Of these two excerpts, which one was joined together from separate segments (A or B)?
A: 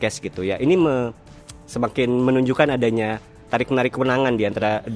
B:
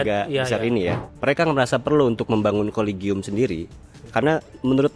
B